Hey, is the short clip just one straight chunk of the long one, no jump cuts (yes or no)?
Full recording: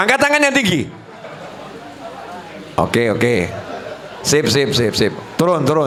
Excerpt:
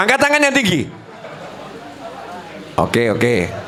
yes